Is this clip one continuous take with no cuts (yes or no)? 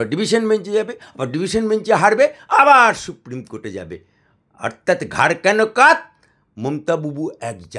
yes